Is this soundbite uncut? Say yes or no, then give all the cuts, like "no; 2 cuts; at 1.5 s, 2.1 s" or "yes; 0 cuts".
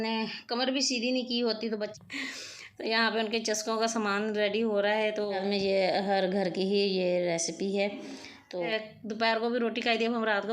no; 3 cuts; at 1.9 s, 5.4 s, 8.7 s